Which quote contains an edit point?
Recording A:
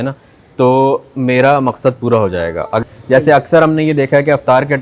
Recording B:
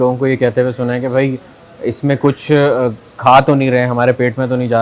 A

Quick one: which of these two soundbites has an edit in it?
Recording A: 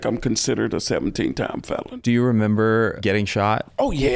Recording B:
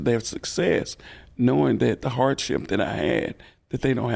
A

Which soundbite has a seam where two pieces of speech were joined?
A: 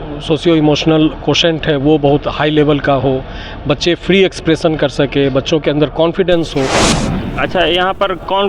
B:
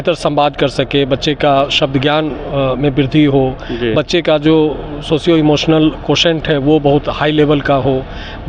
A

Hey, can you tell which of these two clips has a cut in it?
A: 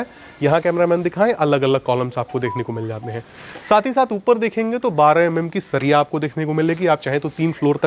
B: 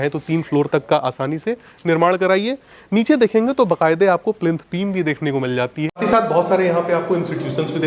B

